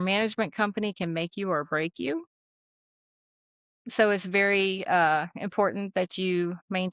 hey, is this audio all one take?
yes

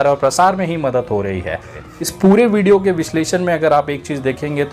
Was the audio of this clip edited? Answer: yes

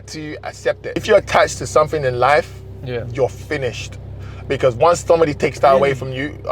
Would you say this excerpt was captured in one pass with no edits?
no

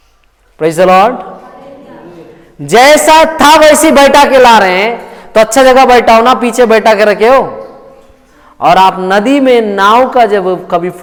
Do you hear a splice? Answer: no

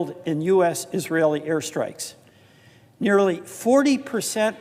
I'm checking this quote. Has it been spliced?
no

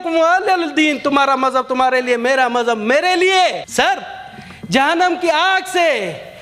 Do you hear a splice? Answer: yes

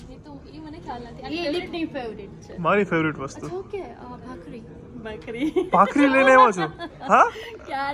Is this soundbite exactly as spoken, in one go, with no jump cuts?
yes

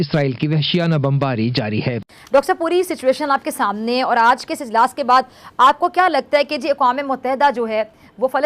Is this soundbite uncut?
no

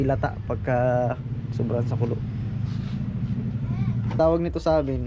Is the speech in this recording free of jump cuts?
no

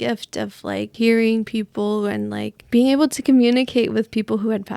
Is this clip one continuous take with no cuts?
no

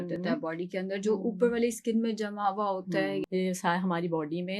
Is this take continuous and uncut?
no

